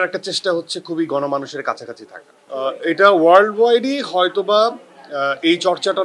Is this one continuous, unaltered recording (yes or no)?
no